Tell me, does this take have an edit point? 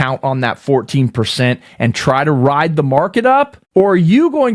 yes; 1 cut; at 3.6 s

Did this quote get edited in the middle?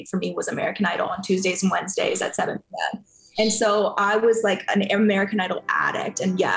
no; 0 cuts

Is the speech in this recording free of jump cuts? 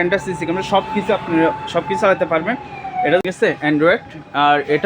no; 1 cut; at 3.1 s

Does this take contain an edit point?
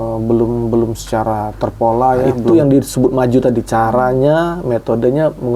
yes; 1 cut; at 2.5 s

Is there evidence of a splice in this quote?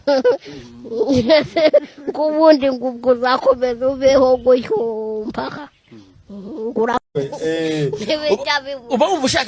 yes; 1 cut; at 7.1 s

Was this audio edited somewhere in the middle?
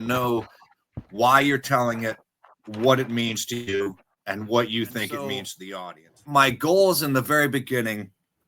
yes; 1 cut; at 5.6 s

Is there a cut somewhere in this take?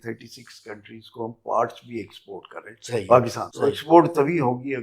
yes; 1 cut; at 3.4 s

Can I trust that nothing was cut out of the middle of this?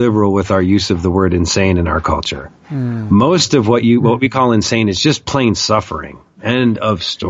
yes; 0 cuts

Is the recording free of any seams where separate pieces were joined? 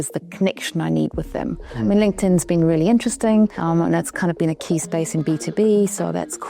no; 1 cut; at 3.6 s

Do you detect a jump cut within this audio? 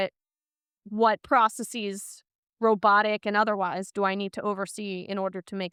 no; 0 cuts

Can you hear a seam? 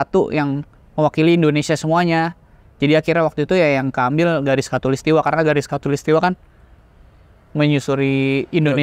no; 0 cuts

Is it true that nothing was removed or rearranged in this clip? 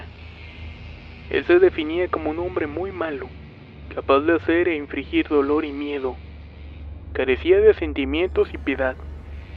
yes; 0 cuts

